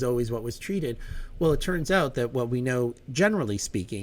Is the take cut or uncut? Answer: uncut